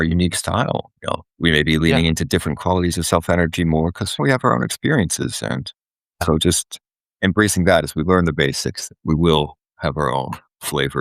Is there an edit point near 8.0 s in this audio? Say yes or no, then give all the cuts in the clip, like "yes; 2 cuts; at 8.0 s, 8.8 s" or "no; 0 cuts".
no; 3 cuts; at 1.3 s, 4.2 s, 6.2 s